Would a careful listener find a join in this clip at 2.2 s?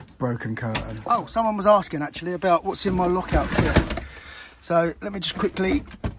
no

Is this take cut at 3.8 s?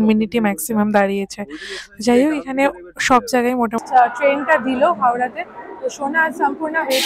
yes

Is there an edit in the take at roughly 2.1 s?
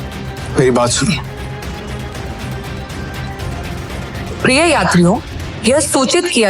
yes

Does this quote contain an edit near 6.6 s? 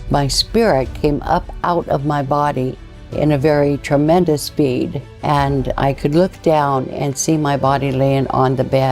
no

